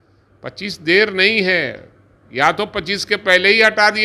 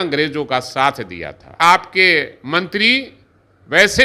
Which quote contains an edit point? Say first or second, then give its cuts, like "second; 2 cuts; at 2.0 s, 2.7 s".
second; 1 cut; at 1.6 s